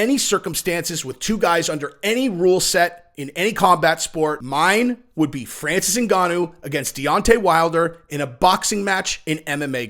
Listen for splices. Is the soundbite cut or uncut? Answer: cut